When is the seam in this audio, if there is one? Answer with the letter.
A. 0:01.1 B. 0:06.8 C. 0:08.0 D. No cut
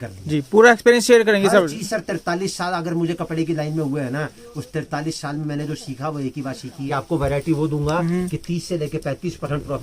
B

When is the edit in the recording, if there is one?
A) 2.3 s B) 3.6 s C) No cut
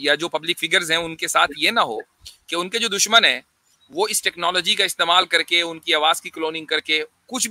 C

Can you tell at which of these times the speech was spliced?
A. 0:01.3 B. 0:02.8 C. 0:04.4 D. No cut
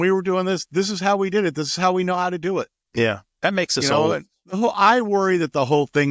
C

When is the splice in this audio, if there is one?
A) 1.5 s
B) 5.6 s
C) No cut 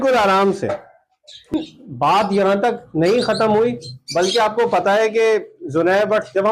A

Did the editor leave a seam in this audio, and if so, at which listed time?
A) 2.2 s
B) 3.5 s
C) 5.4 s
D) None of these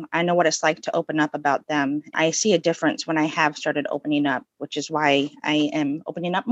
A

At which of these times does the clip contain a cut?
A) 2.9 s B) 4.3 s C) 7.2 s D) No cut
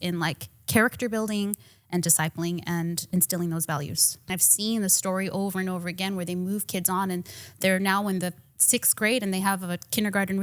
B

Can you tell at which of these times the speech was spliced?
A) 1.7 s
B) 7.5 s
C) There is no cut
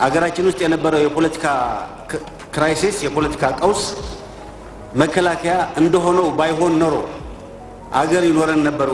C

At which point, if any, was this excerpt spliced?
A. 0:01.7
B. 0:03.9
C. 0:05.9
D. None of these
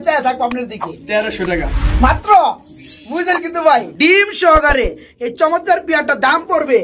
B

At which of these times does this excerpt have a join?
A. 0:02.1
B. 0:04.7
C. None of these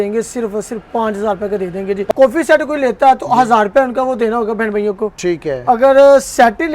A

